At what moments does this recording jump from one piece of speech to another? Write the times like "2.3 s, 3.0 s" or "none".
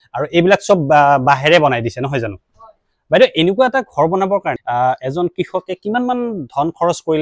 2.6 s, 4.6 s